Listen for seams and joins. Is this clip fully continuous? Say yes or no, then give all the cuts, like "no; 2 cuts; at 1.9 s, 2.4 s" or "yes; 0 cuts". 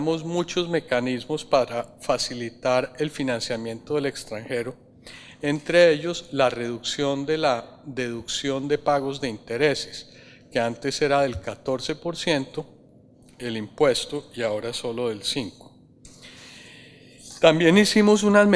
yes; 0 cuts